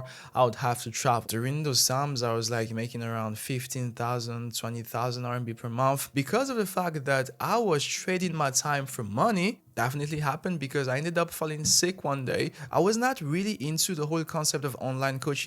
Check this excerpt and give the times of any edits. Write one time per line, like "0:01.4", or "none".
0:01.3
0:06.1
0:09.6
0:12.6

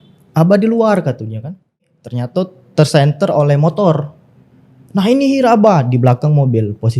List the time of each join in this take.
0:01.9

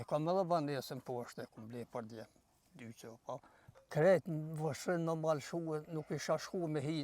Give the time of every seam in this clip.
0:03.6

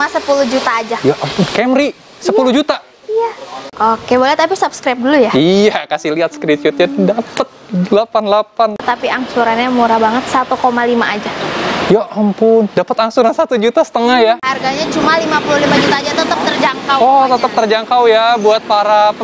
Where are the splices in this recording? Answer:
0:03.7
0:08.8
0:14.4

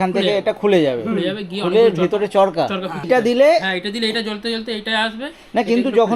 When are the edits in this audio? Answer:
0:03.1

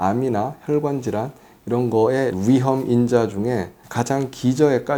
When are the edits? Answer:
none

